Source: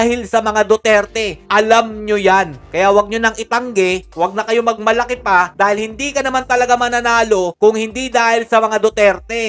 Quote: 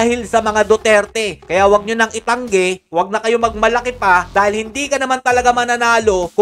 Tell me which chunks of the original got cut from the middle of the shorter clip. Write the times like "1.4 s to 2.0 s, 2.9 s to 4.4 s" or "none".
1.4 s to 2.6 s